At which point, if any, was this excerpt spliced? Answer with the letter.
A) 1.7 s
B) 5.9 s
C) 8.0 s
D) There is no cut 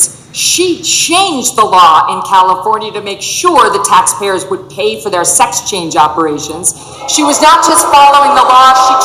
D